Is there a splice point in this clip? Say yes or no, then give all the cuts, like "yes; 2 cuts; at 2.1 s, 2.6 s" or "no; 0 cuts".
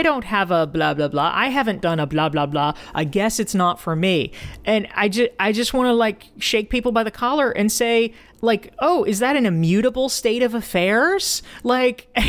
no; 0 cuts